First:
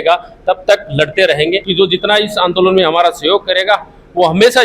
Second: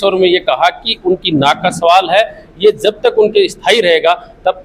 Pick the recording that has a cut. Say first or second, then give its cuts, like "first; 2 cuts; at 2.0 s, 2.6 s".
first; 1 cut; at 1.7 s